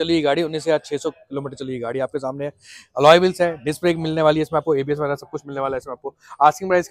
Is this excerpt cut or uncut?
uncut